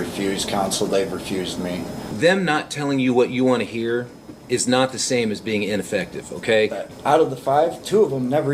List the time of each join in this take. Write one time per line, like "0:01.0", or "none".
0:02.0
0:06.9